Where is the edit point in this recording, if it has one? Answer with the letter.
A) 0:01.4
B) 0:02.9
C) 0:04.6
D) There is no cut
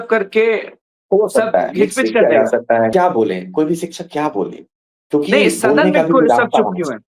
B